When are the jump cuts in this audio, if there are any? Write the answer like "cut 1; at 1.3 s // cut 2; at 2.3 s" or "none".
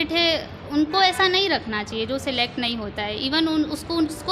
none

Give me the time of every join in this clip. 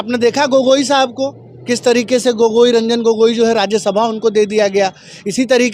none

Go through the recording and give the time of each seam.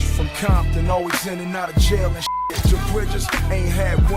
cut 1; at 2.6 s

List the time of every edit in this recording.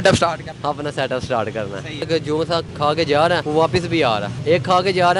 cut 1; at 2.1 s // cut 2; at 3.4 s // cut 3; at 4.4 s

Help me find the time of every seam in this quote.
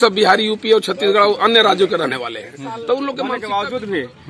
cut 1; at 3.4 s

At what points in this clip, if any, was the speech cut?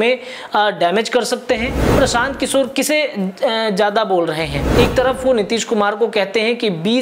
cut 1; at 1.9 s // cut 2; at 4.6 s

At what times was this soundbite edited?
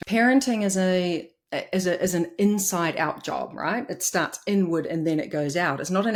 none

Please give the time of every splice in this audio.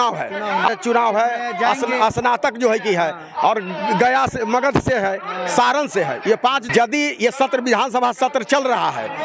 cut 1; at 0.7 s // cut 2; at 6.6 s

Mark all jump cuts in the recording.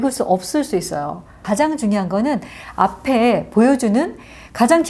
cut 1; at 1.4 s

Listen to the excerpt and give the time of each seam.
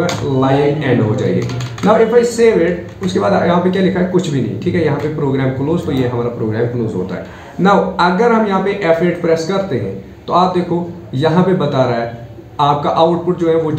none

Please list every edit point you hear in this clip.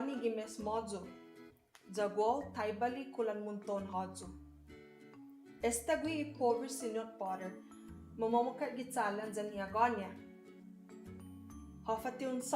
cut 1; at 10.1 s // cut 2; at 11.8 s

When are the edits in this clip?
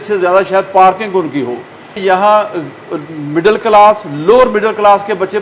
cut 1; at 1.9 s

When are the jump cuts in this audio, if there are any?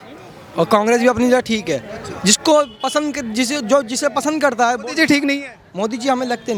none

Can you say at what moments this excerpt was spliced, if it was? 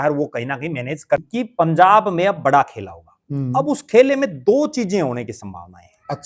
cut 1; at 1.2 s

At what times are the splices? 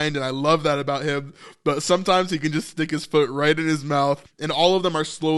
cut 1; at 4.3 s

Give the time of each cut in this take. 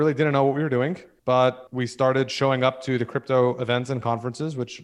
cut 1; at 1.1 s // cut 2; at 1.7 s

